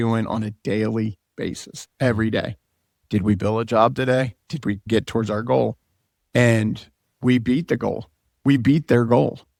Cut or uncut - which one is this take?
uncut